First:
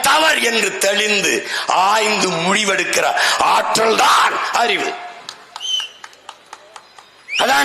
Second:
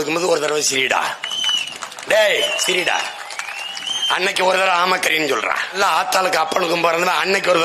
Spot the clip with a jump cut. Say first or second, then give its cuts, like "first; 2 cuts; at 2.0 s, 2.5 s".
second; 1 cut; at 5.7 s